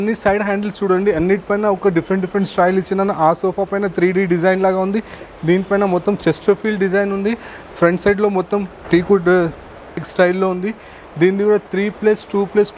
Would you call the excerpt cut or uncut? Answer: uncut